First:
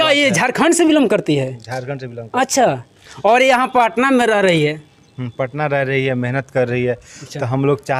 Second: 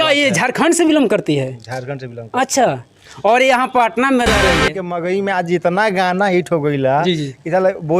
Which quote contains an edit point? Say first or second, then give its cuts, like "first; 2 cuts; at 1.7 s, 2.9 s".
second; 1 cut; at 4.8 s